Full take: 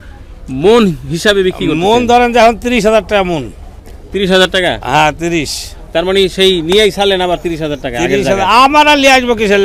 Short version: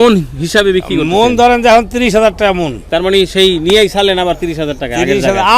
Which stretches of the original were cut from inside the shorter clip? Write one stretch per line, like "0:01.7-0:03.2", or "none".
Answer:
0:03.5-0:05.8